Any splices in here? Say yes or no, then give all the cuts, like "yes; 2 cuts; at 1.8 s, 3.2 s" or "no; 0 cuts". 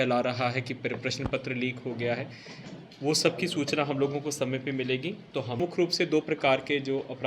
yes; 1 cut; at 5.6 s